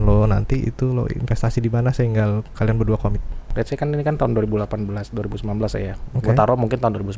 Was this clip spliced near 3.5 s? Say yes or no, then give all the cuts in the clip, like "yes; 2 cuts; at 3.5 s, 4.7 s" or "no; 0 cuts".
yes; 1 cut; at 3.5 s